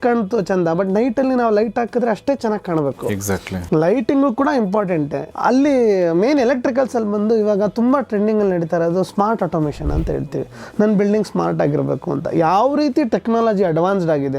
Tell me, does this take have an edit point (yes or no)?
yes